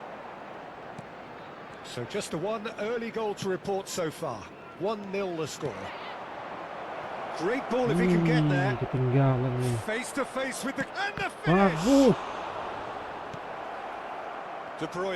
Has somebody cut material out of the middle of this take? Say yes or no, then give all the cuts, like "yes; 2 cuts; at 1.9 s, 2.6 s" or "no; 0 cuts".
no; 0 cuts